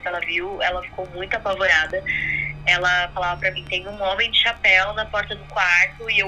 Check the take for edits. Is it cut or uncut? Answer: uncut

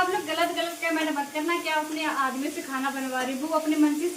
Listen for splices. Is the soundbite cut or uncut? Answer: uncut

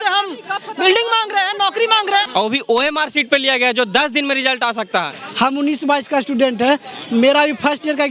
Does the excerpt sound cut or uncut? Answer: cut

